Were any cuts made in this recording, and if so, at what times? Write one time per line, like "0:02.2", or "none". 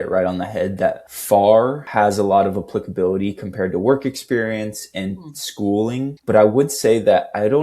0:01.1
0:01.8

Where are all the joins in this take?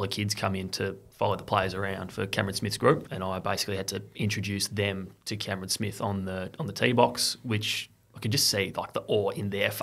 0:03.1

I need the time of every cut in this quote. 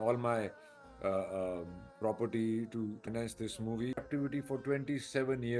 0:03.1
0:04.1

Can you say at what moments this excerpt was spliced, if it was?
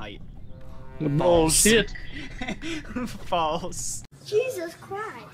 0:04.1

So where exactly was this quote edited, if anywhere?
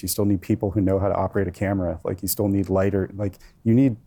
none

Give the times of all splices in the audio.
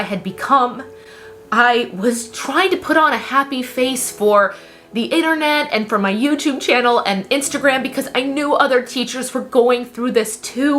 none

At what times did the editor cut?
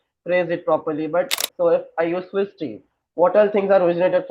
0:01.4

